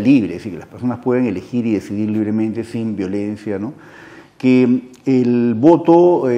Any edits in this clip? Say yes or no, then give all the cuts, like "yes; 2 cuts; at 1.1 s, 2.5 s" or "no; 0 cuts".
no; 0 cuts